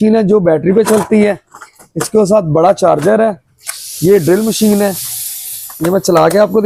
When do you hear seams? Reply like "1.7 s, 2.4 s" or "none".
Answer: none

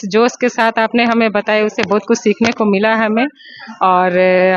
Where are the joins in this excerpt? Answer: none

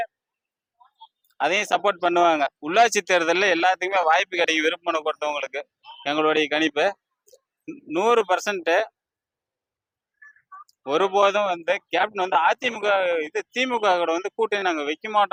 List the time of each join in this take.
none

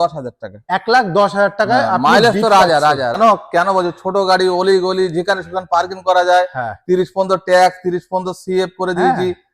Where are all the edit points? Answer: 3.2 s

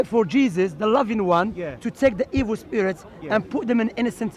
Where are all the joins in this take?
none

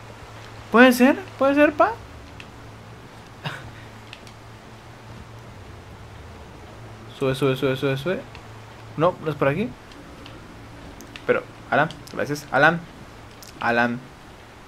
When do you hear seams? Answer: 9.8 s

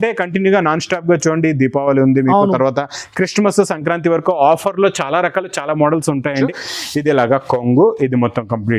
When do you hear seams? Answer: 6.5 s

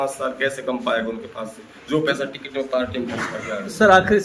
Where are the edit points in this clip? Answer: none

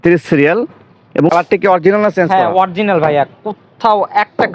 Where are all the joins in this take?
1.3 s

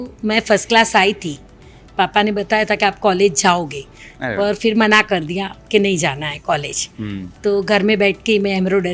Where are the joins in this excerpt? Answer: none

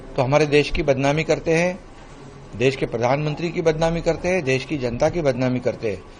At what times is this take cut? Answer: none

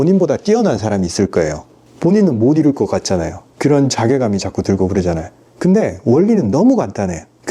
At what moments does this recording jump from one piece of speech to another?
1.9 s

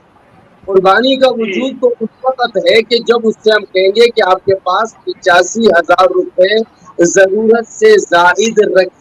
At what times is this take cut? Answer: none

